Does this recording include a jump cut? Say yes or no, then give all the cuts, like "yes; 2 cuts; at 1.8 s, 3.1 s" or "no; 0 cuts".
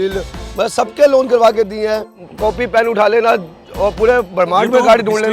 yes; 1 cut; at 2.1 s